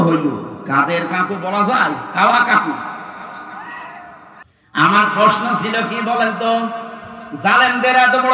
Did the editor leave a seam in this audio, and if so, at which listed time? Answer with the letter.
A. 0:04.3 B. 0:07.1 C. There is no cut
A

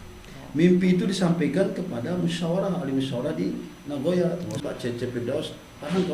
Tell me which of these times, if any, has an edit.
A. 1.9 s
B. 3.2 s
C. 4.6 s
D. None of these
C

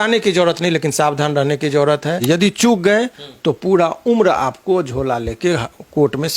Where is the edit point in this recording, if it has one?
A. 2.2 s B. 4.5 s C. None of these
A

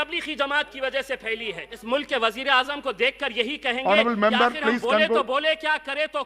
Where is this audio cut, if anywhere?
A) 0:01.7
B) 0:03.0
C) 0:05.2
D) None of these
A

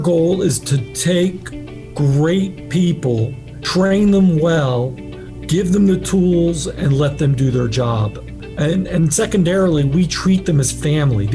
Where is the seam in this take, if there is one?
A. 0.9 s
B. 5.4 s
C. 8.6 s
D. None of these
A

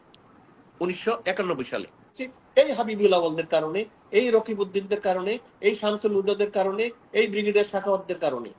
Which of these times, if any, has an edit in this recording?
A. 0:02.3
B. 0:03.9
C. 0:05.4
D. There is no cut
A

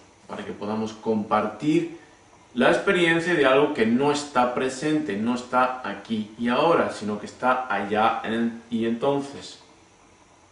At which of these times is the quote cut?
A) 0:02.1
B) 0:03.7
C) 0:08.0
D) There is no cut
B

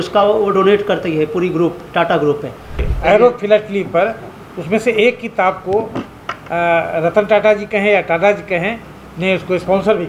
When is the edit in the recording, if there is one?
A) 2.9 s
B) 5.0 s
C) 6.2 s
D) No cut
A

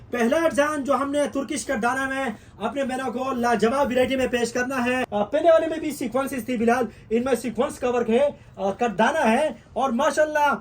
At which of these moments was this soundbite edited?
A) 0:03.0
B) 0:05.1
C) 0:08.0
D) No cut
B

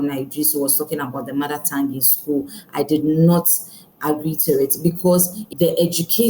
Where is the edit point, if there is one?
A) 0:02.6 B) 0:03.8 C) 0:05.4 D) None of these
C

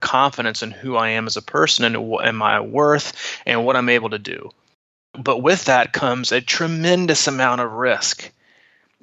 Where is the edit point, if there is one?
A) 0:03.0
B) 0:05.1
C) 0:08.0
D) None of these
B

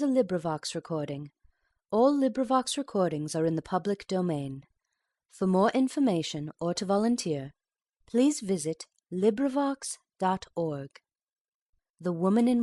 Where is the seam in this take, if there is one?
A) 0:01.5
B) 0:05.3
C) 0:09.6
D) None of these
D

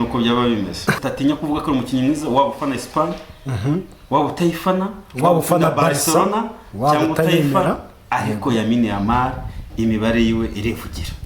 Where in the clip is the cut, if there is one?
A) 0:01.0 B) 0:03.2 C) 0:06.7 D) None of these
A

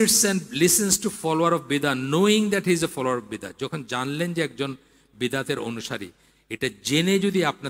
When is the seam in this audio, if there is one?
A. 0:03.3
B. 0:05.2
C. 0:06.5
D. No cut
D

